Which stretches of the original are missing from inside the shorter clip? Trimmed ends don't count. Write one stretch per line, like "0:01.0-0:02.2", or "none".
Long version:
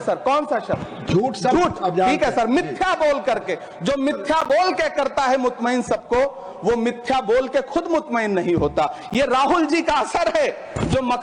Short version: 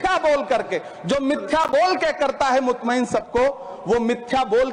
none